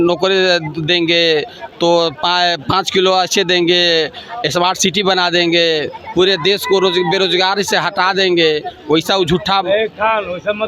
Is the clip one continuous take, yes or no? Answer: yes